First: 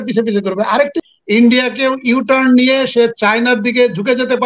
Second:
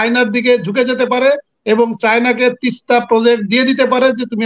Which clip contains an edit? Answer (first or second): first